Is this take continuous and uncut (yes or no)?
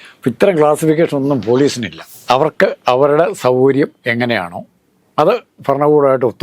yes